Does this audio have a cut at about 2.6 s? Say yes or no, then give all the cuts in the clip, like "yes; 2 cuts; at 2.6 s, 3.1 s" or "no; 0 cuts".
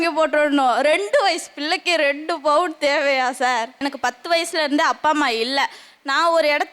no; 1 cut; at 3.8 s